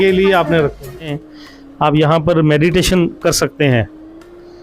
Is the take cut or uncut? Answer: cut